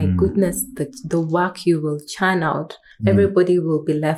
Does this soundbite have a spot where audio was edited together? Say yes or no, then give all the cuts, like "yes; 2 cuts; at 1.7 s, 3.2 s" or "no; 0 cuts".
no; 0 cuts